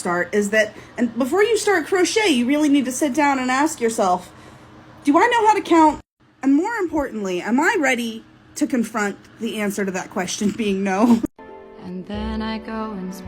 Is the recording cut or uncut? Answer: cut